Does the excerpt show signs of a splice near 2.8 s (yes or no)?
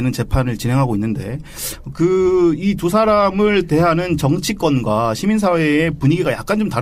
no